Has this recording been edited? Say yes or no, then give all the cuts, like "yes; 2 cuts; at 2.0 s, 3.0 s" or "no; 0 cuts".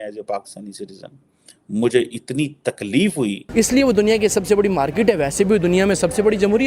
yes; 1 cut; at 3.4 s